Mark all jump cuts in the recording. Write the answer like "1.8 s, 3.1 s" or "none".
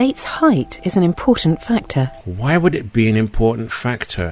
none